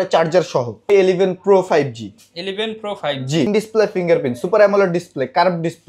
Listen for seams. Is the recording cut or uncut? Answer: cut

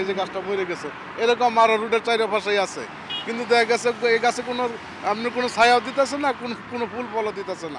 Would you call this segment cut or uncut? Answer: uncut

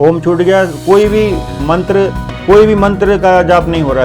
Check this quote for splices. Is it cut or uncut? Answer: cut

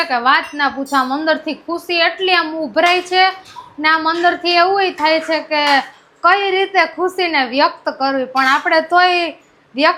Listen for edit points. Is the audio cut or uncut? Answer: uncut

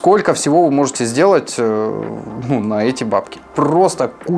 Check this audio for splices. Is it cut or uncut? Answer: uncut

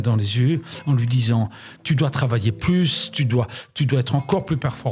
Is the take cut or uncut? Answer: uncut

